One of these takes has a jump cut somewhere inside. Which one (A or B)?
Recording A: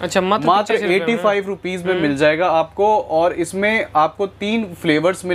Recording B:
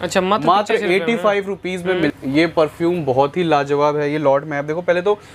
B